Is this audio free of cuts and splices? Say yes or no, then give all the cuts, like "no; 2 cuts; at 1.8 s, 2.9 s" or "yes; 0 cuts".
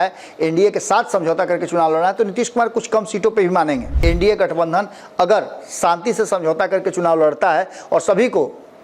no; 1 cut; at 3.9 s